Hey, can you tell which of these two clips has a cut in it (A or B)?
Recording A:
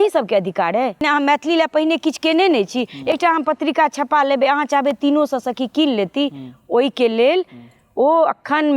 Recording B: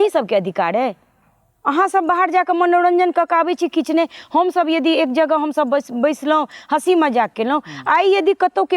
A